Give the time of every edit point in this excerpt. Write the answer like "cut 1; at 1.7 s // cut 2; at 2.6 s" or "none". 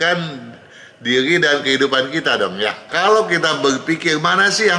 cut 1; at 2.8 s